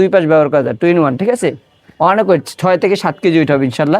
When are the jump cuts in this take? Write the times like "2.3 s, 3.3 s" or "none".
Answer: none